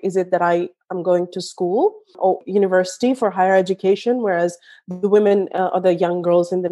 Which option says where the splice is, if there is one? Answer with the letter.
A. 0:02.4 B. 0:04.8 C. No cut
A